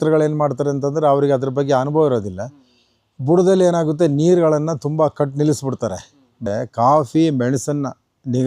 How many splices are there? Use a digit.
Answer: 1